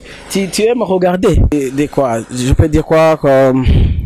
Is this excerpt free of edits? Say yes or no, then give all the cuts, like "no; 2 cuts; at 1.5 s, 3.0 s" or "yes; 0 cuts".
no; 1 cut; at 1.5 s